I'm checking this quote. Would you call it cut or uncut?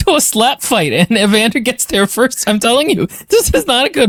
uncut